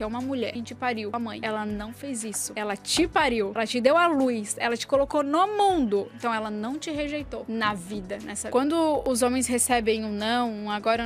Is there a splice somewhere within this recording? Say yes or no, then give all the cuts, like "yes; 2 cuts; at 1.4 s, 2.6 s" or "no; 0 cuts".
no; 0 cuts